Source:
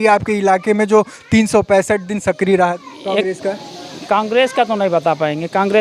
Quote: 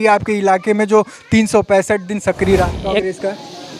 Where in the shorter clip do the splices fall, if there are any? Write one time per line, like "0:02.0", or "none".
0:02.7